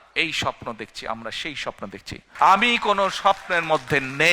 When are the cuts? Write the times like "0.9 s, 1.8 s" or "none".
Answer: 2.3 s